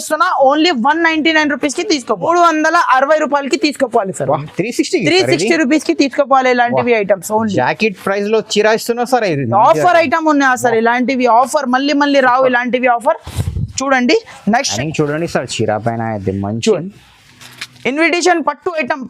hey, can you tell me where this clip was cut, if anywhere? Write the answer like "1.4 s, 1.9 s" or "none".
2.3 s, 14.7 s

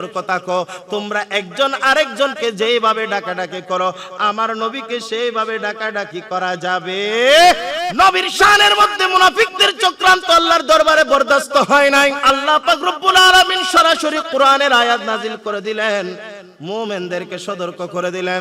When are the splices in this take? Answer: 7.9 s, 12.2 s

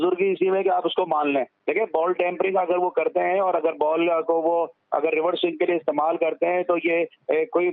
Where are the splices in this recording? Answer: 1.6 s

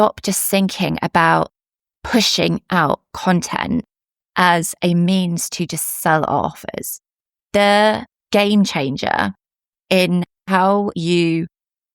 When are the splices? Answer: 8.1 s, 10.6 s

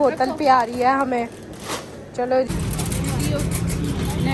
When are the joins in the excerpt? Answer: 2.5 s

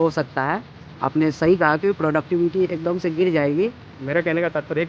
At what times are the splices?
3.9 s

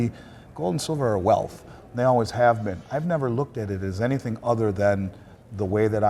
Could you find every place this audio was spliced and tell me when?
none

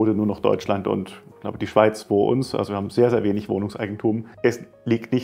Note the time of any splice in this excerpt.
4.3 s

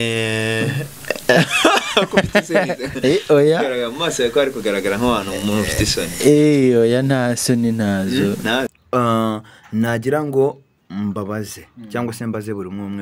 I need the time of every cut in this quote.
8.8 s

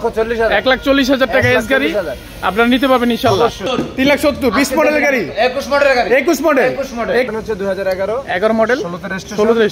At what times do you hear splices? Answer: 3.6 s, 7.3 s

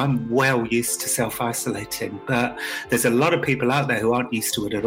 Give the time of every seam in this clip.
none

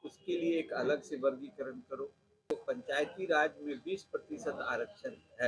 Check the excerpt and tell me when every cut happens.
2.5 s

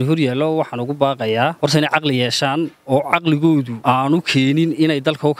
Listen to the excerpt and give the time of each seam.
1.5 s, 3.7 s

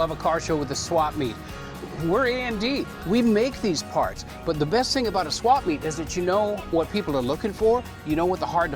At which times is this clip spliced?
none

